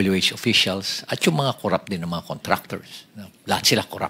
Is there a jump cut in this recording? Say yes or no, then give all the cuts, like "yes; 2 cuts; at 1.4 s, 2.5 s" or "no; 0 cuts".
no; 0 cuts